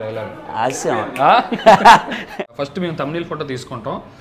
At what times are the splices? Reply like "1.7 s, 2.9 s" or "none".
2.4 s